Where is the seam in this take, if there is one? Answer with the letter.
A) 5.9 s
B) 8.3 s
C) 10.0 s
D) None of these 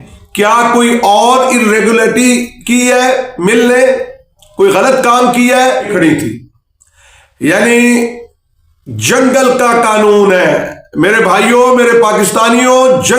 A